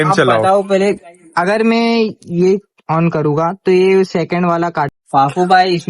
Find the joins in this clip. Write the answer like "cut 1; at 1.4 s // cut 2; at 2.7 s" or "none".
cut 1; at 4.9 s